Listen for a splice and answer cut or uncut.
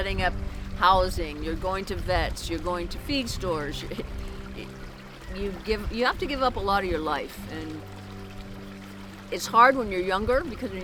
uncut